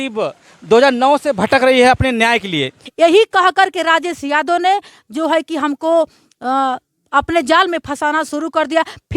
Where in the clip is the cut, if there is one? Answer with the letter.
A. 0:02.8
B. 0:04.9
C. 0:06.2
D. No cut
A